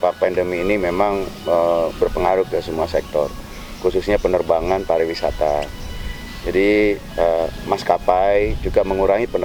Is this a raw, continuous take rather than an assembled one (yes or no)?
yes